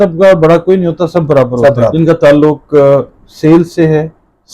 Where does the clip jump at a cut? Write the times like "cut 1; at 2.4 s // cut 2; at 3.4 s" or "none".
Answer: cut 1; at 1.9 s